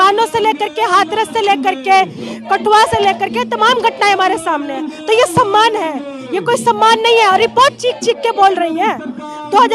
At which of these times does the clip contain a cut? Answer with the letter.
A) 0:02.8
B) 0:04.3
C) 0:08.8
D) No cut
D